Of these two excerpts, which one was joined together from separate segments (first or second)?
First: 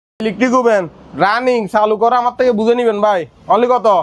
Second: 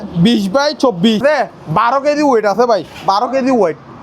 second